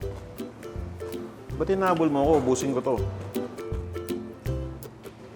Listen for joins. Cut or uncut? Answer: uncut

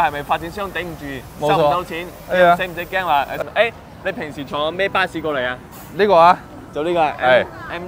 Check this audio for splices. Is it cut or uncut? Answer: cut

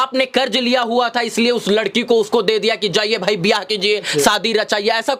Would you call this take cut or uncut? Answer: uncut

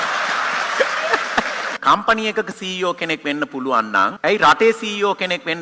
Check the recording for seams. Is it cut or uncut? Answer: cut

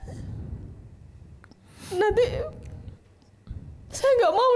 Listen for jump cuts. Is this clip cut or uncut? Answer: uncut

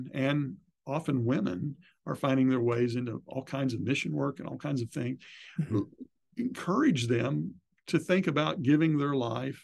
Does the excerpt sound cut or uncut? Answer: uncut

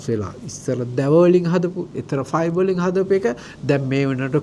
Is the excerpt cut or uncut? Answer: uncut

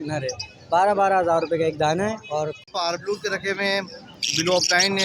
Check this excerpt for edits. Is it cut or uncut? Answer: cut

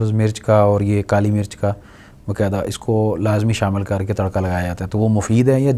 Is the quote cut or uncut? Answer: uncut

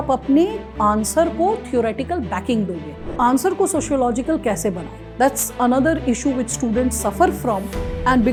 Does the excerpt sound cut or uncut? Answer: uncut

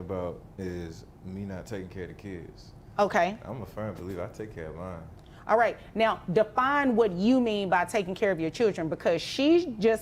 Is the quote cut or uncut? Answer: uncut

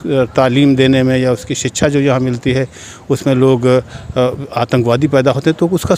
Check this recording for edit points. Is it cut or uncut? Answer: uncut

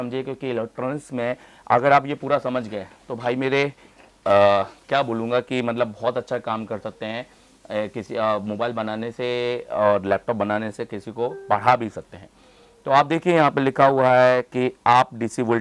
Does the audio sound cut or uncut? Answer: uncut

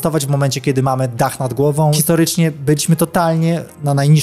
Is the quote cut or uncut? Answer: cut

